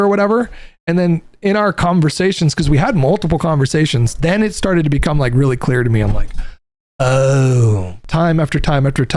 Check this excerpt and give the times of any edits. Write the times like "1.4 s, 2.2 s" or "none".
8.0 s